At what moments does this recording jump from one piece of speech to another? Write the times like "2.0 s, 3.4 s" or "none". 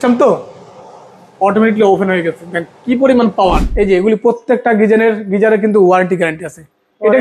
3.7 s